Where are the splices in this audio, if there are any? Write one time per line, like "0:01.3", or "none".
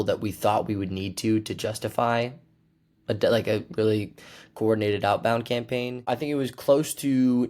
0:06.1

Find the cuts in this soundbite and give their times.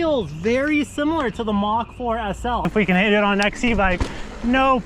0:02.6

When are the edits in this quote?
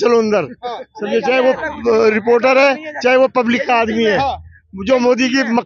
none

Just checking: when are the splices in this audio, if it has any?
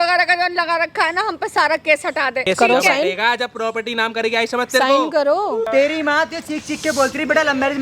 0:02.4
0:05.7

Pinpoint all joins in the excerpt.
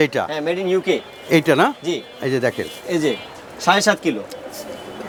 none

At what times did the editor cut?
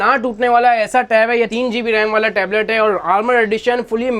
0:01.5

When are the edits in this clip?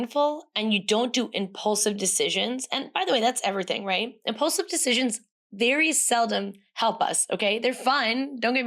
none

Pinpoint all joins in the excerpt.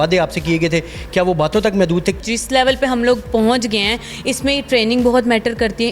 0:02.2

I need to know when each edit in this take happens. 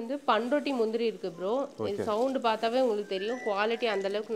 none

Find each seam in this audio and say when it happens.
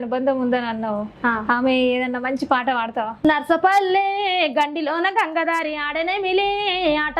0:03.2

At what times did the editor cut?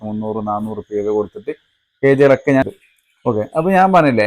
0:02.7

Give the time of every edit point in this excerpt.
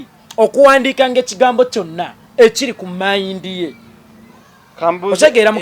none

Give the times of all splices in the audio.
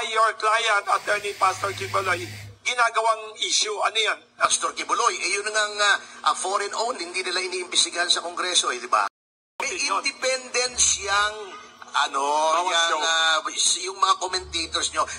0:04.4
0:09.3

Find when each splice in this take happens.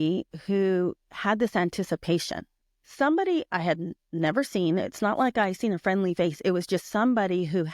0:02.8

